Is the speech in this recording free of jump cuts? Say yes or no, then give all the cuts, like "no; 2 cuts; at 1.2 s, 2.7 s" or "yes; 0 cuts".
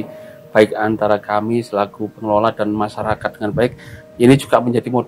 yes; 0 cuts